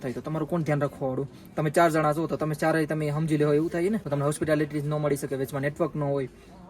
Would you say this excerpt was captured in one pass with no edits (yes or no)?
no